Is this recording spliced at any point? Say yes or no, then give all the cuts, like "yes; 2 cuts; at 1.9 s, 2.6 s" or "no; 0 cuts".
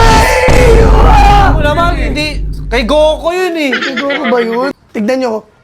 yes; 1 cut; at 4.7 s